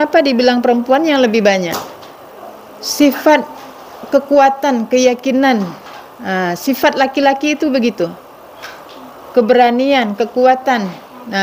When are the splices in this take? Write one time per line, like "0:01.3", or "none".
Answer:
none